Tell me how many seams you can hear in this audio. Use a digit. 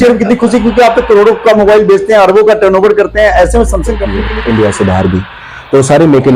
1